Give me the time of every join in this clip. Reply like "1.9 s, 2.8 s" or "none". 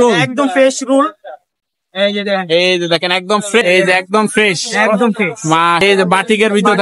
3.6 s, 5.8 s